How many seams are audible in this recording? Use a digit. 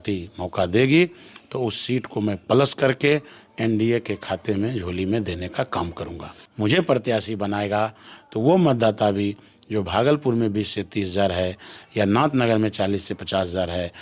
1